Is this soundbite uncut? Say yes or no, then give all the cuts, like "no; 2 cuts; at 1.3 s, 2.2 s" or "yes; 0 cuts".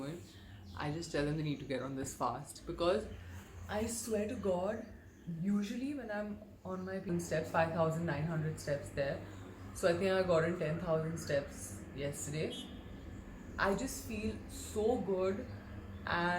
no; 1 cut; at 7.1 s